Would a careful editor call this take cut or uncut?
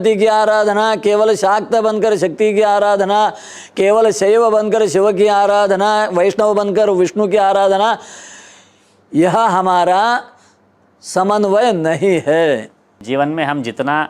cut